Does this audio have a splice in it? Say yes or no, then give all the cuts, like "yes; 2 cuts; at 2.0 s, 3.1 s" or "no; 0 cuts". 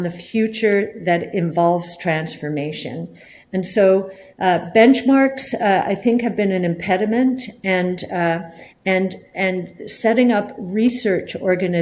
no; 0 cuts